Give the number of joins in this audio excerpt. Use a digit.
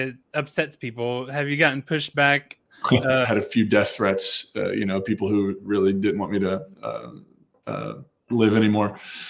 1